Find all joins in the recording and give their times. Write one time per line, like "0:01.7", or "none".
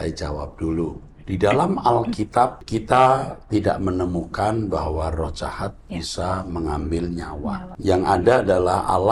0:01.1
0:02.6
0:07.7